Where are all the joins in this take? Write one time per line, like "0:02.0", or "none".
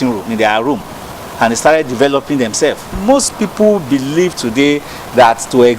0:02.9